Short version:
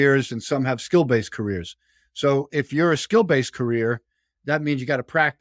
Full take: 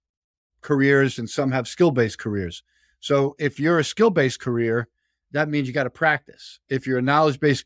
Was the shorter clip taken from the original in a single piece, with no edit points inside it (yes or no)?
yes